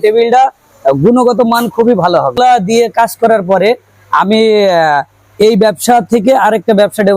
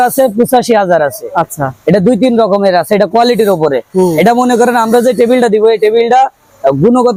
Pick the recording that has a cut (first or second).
first